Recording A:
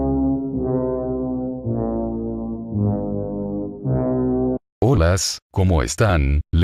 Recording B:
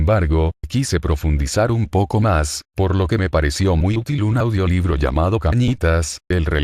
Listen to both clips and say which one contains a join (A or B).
A